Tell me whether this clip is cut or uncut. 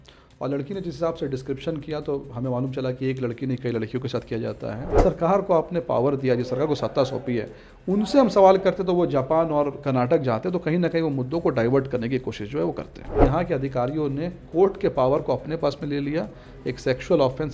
cut